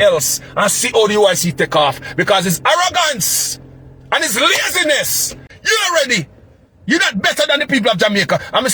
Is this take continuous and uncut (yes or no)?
no